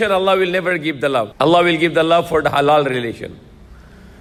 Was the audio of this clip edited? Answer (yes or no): no